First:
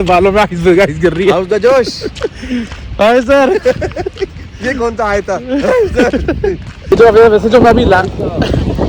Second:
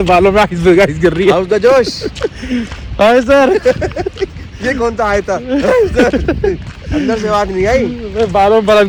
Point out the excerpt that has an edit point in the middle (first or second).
first